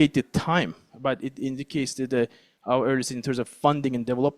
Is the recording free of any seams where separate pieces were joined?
yes; 0 cuts

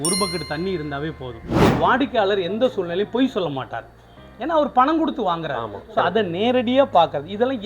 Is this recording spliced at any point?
yes; 1 cut; at 1.6 s

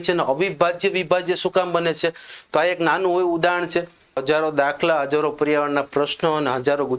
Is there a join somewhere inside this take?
yes; 1 cut; at 4.2 s

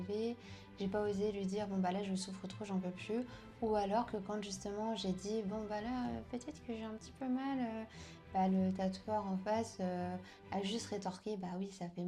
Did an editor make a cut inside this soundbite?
no; 0 cuts

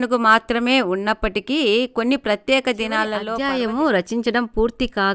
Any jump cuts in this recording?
yes; 1 cut; at 3.3 s

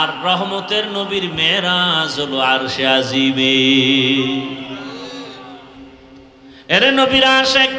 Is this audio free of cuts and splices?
yes; 0 cuts

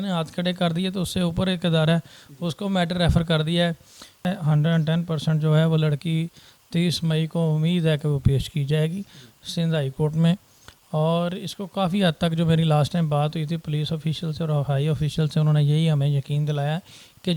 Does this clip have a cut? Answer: yes; 1 cut; at 4.3 s

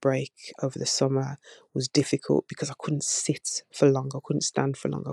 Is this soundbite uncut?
yes; 0 cuts

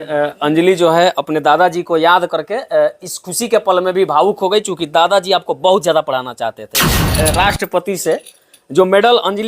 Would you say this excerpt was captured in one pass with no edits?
no; 1 cut; at 7.1 s

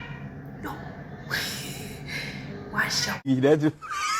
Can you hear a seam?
yes; 1 cut; at 3.3 s

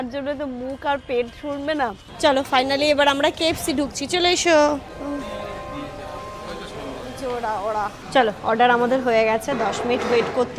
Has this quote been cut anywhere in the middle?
yes; 2 cuts; at 2.0 s, 8.0 s

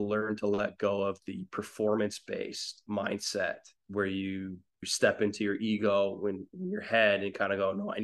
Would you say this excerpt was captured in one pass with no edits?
no; 3 cuts; at 2.8 s, 3.8 s, 4.9 s

